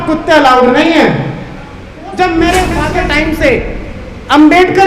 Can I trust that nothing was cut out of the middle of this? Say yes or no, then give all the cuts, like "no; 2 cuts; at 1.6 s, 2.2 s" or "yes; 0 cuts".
no; 1 cut; at 2.8 s